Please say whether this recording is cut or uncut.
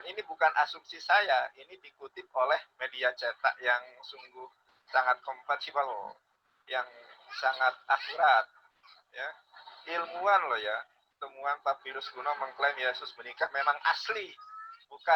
uncut